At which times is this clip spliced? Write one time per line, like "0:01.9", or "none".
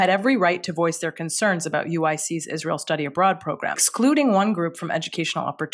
0:03.9